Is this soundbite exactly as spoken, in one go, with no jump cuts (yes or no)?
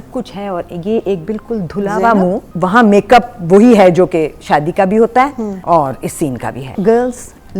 no